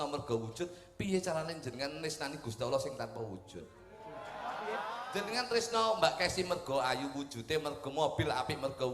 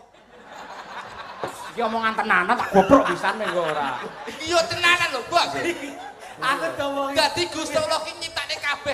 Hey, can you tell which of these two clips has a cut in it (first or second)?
first